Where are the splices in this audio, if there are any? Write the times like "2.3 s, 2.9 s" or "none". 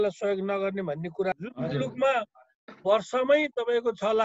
1.4 s